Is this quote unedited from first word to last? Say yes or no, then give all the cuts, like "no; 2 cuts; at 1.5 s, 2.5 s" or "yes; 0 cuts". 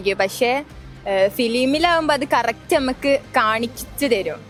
yes; 0 cuts